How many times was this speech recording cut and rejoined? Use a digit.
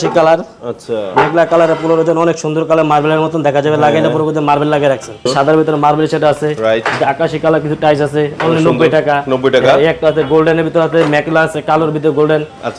1